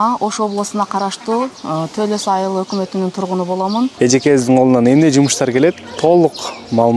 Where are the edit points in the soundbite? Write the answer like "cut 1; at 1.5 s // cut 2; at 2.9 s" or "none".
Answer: cut 1; at 3.9 s